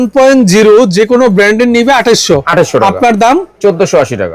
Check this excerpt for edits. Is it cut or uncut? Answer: uncut